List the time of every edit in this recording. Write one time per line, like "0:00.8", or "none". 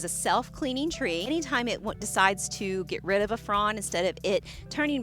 0:01.3